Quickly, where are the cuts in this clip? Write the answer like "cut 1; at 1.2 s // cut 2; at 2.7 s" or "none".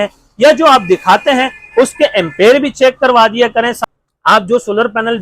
cut 1; at 3.7 s